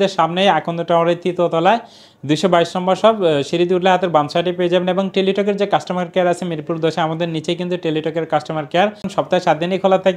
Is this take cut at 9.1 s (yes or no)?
yes